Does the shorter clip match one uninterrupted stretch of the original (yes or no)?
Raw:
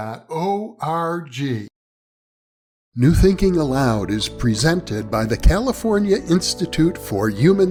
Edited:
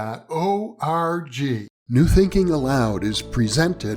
no